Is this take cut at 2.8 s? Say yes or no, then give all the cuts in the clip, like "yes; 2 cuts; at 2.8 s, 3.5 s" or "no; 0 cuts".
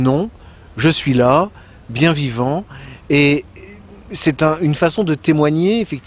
yes; 1 cut; at 2.8 s